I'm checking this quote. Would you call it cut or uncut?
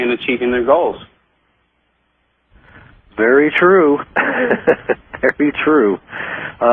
cut